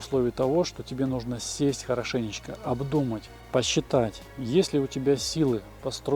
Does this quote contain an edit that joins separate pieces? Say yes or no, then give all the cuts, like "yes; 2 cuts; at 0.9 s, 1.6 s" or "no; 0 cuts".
yes; 2 cuts; at 3.3 s, 4.3 s